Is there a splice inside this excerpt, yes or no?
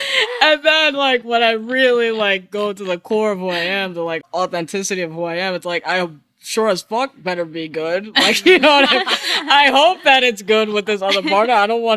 yes